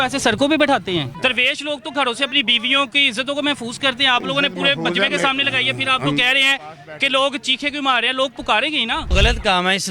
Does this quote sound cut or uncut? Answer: cut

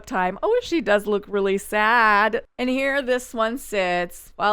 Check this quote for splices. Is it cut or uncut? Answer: cut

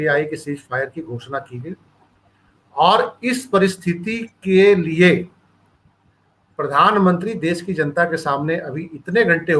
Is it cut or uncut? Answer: uncut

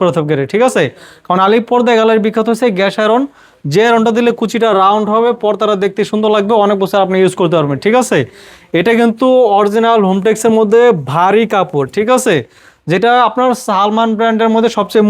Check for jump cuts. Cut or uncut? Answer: uncut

